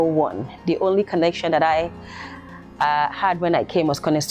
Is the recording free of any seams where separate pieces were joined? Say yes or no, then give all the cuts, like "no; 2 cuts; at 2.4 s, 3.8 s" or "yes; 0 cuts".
yes; 0 cuts